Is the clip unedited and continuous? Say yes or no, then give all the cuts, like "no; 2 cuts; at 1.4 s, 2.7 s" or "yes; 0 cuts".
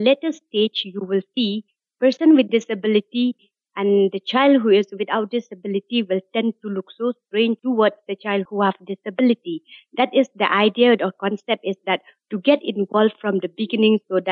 yes; 0 cuts